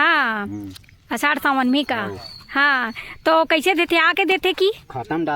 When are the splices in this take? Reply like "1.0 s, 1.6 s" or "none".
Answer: none